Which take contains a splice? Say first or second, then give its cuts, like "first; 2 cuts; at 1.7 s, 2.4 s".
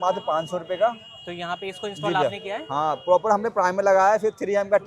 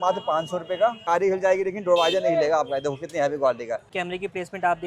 second; 2 cuts; at 1.0 s, 3.9 s